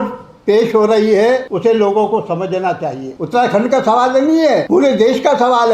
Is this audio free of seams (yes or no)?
no